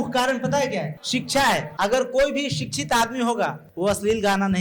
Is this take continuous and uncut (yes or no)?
no